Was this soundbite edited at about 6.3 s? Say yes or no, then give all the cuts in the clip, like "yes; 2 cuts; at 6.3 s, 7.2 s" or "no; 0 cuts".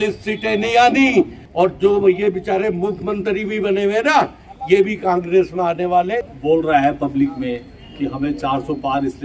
yes; 2 cuts; at 1.4 s, 6.3 s